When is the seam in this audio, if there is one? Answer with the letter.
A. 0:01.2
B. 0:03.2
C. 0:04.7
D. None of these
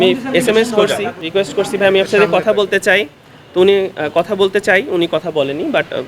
A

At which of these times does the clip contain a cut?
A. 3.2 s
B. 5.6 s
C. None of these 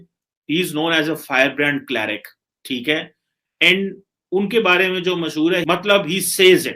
B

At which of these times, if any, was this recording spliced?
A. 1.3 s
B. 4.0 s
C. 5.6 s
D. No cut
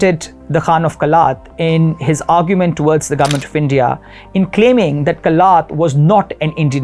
D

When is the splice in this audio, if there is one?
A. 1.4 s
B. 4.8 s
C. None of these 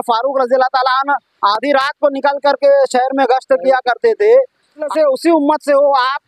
B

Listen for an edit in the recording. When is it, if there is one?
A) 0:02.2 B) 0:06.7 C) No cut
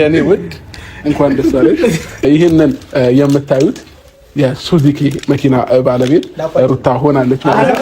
A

